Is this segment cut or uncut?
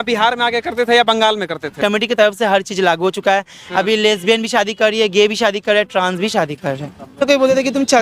cut